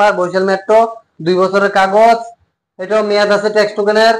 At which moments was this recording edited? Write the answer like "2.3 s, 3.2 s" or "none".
none